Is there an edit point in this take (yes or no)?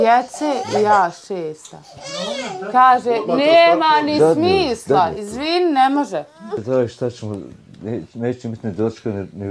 yes